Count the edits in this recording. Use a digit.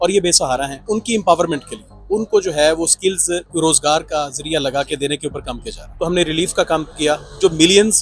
3